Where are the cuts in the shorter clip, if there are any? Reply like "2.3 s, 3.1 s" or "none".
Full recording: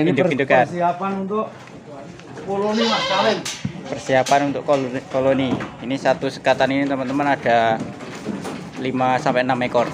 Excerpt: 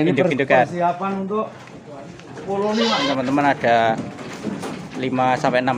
3.1 s